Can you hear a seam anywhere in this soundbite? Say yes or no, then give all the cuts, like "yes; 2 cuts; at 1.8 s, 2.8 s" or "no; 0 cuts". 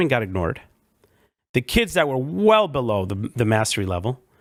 no; 0 cuts